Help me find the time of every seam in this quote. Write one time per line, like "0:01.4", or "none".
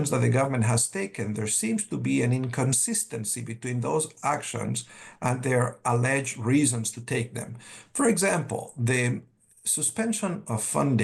none